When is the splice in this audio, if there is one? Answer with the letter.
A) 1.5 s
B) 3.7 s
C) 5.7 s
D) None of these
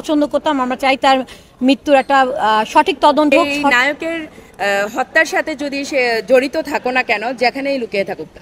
B